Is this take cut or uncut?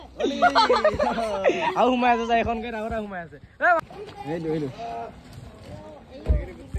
cut